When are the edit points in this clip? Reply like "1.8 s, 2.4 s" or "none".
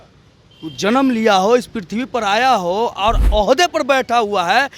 3.2 s